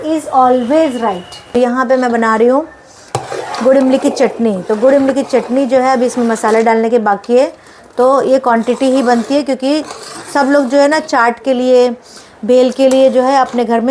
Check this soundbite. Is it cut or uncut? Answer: cut